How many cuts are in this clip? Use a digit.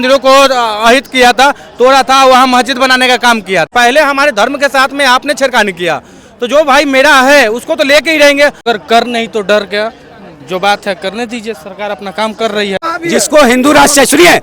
3